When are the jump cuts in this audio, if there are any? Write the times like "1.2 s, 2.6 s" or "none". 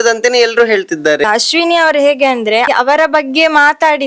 1.2 s, 2.7 s

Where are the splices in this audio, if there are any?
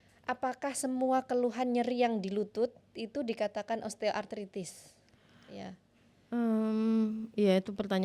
none

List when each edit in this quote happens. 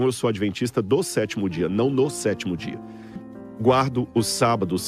3.3 s

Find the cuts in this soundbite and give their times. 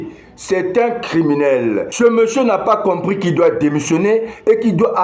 1.9 s

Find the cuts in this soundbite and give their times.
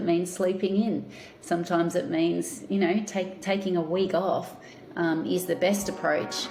none

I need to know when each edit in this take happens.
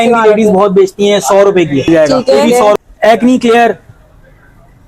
2.8 s

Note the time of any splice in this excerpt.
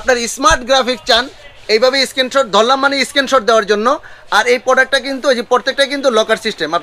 none

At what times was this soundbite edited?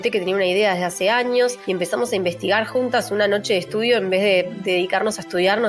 1.6 s, 4.6 s

